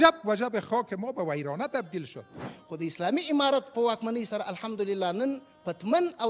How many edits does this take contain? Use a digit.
1